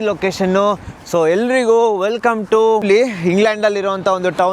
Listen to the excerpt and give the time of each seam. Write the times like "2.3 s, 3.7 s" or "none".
2.8 s